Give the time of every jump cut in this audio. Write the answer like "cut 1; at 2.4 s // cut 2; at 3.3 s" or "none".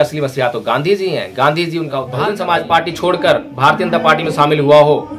cut 1; at 2.0 s